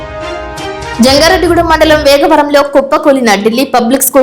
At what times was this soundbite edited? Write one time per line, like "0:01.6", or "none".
0:01.0